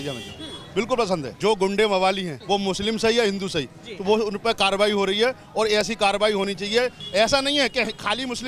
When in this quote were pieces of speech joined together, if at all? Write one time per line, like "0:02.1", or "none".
0:01.3
0:02.3
0:07.0